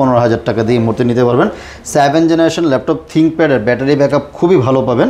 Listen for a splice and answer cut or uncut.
uncut